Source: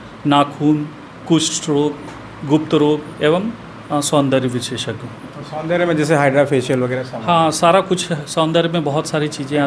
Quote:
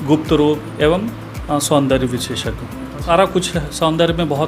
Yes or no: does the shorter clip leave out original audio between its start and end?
yes